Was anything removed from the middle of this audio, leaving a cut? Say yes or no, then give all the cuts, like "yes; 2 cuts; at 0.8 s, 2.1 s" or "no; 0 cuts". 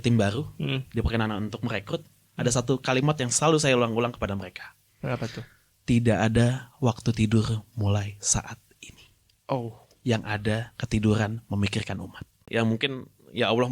yes; 1 cut; at 12.4 s